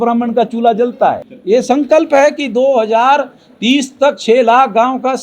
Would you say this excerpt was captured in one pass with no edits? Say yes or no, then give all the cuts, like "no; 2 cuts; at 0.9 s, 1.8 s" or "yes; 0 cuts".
yes; 0 cuts